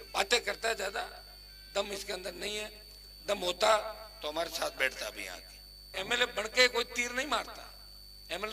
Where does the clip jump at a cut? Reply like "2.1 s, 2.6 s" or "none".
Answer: 5.9 s